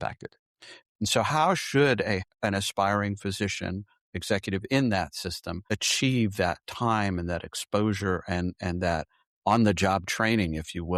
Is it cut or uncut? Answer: cut